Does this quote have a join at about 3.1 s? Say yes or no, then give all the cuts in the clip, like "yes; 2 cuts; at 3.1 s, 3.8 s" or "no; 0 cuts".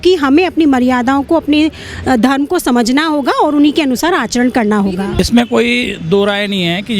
no; 1 cut; at 5.2 s